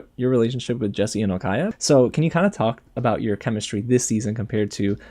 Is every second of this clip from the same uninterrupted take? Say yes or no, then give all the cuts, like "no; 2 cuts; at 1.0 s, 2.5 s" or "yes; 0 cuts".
no; 1 cut; at 1.7 s